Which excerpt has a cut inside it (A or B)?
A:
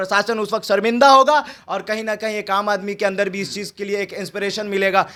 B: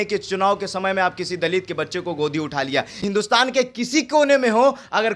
B